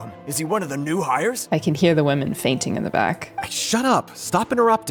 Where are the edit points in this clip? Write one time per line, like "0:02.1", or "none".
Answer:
none